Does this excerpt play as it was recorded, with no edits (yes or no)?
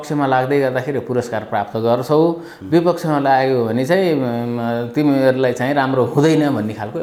yes